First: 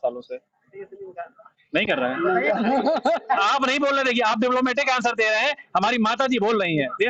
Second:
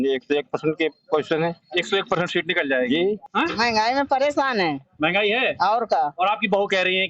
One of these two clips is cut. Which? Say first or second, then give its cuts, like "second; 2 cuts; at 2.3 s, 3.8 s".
second; 1 cut; at 3.3 s